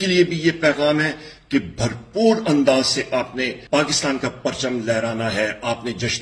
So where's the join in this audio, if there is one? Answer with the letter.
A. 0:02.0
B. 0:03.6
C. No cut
B